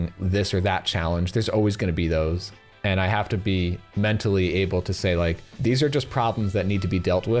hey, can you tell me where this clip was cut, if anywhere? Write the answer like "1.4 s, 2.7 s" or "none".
2.5 s